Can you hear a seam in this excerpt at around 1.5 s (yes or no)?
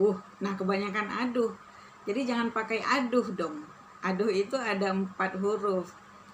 no